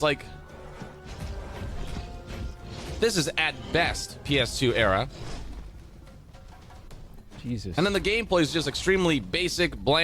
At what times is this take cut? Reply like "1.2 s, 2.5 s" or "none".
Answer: none